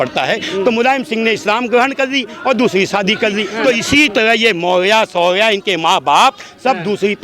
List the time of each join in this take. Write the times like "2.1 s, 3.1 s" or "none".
3.5 s